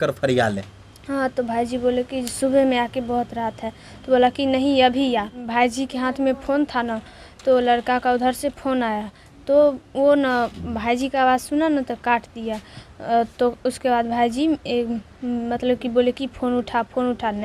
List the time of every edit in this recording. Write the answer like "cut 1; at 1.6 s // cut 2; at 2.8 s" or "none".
cut 1; at 5.4 s